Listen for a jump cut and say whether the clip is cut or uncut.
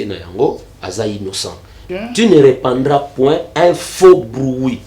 cut